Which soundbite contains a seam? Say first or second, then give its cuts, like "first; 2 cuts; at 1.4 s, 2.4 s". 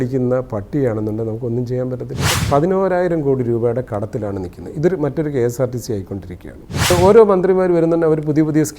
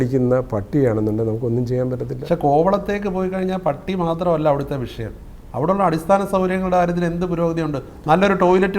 first; 2 cuts; at 2.2 s, 6.9 s